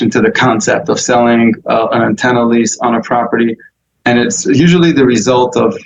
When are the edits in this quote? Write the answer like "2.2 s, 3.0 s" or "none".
none